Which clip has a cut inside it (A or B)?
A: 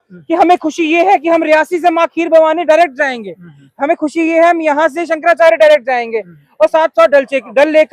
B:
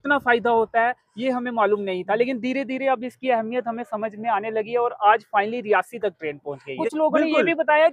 B